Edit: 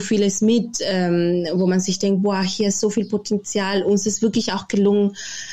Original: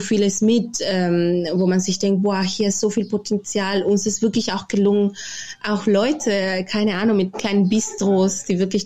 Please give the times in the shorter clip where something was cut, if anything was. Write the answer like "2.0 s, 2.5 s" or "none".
none